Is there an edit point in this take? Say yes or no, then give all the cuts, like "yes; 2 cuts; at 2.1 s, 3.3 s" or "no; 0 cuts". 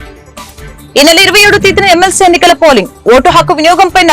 yes; 1 cut; at 0.9 s